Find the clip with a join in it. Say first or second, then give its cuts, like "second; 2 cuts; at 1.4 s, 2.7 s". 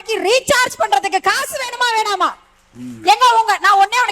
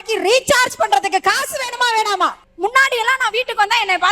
second; 1 cut; at 2.4 s